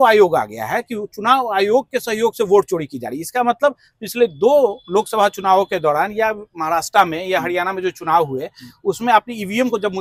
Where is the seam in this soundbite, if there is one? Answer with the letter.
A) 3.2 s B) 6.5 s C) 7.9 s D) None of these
D